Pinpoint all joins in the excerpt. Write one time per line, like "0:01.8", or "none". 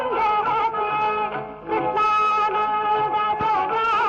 none